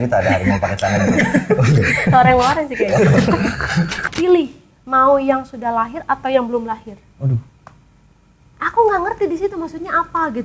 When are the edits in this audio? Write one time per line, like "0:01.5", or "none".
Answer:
0:04.0

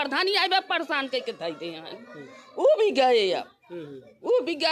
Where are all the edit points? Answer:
none

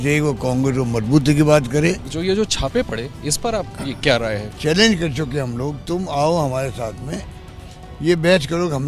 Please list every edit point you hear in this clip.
0:02.1
0:04.5

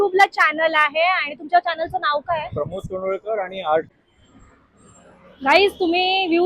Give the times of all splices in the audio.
0:04.4

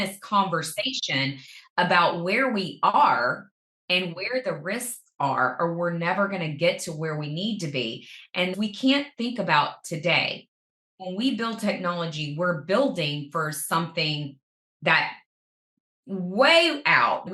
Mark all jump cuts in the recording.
0:08.5
0:10.9

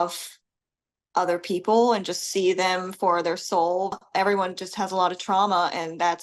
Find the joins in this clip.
0:03.9

